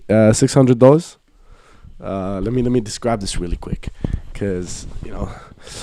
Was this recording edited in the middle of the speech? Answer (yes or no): no